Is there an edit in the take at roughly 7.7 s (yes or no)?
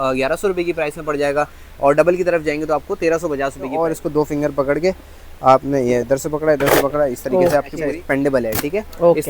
yes